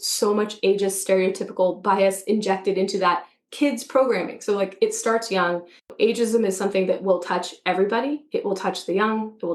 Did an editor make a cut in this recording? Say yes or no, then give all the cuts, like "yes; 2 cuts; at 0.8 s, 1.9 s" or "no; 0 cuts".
yes; 1 cut; at 5.9 s